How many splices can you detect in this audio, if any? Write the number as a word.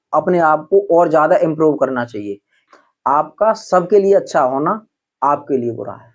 one